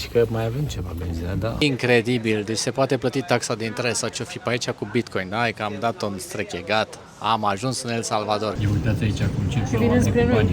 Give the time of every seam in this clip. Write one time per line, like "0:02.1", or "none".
0:01.6
0:08.6